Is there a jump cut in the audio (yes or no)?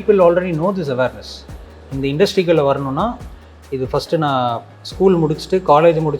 no